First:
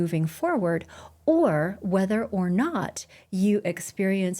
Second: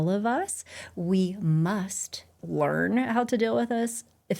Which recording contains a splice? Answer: second; 1 cut; at 2.3 s

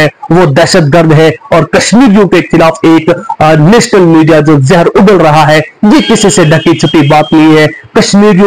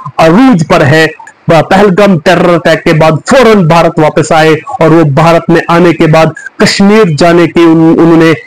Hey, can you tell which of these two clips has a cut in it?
second; 1 cut; at 1.2 s

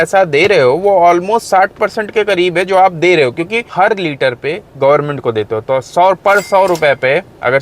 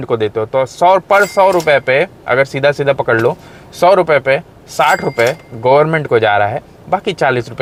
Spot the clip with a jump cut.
first; 1 cut; at 3.6 s

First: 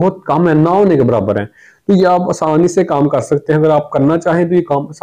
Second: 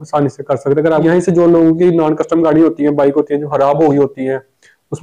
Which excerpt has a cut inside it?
second; 1 cut; at 1.1 s

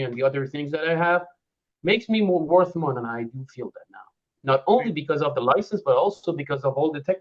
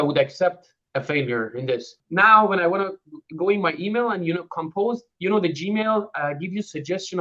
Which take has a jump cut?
second; 1 cut; at 2.0 s

